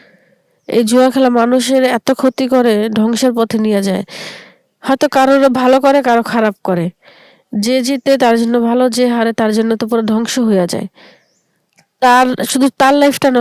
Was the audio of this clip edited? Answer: no; 0 cuts

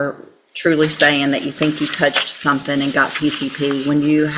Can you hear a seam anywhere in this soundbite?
no; 0 cuts

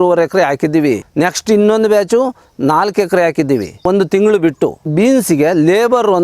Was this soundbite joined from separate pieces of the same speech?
yes; 3 cuts; at 1.1 s, 3.8 s, 4.9 s

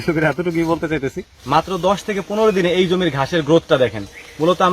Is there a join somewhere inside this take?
yes; 1 cut; at 1.3 s

